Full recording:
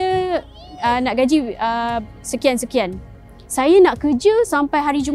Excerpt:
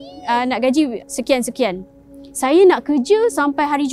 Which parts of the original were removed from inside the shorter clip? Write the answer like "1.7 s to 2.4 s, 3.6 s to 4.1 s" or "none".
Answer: 1.5 s to 2.1 s